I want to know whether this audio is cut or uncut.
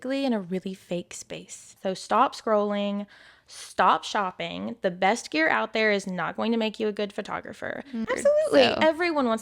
cut